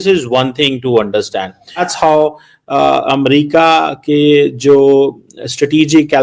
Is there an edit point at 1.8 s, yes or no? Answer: yes